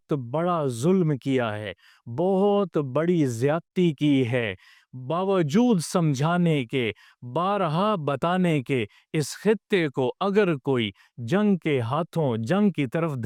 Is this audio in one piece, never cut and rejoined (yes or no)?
yes